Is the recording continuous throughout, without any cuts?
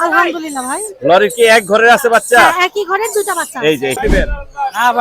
no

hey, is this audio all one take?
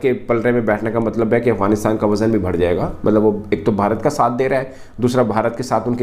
yes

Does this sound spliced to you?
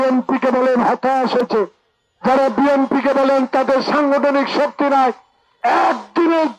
yes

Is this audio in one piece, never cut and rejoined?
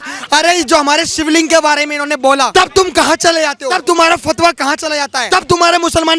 no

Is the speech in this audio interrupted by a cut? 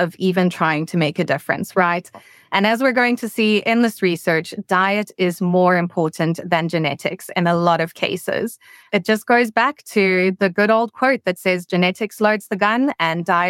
yes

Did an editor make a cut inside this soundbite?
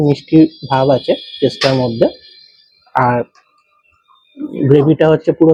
no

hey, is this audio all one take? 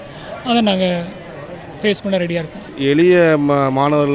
no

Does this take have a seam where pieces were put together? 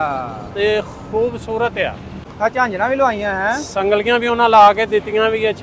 yes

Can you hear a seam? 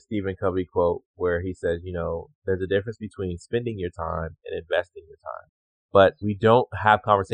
no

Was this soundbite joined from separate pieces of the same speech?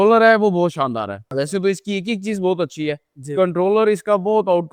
no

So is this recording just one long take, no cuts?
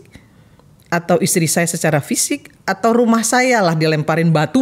yes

